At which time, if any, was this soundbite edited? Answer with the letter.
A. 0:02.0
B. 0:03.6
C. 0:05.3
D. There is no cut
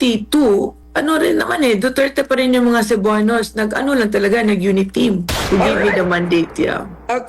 C